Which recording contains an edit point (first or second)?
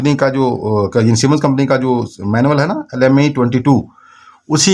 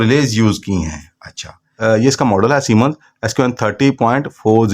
second